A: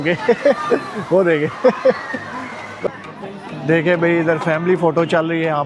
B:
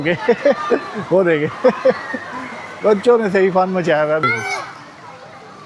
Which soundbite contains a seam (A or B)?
A